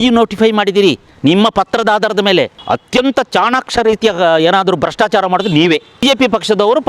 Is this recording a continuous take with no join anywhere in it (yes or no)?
no